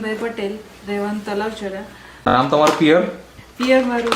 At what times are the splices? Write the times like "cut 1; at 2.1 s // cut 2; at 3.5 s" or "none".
cut 1; at 2.3 s